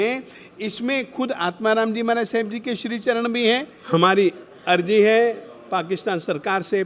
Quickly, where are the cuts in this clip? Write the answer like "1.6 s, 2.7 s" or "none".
3.7 s

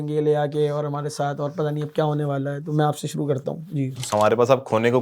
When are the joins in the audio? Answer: 4.1 s

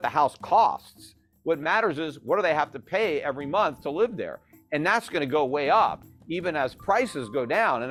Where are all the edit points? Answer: none

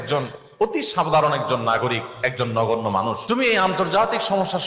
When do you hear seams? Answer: 3.2 s

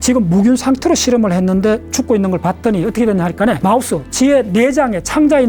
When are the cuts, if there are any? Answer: 3.6 s

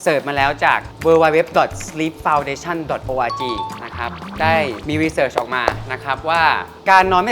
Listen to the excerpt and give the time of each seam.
none

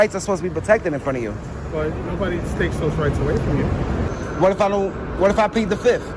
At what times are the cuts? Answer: 4.1 s

